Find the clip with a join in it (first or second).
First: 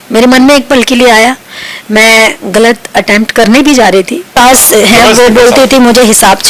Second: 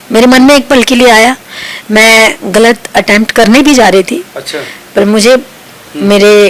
first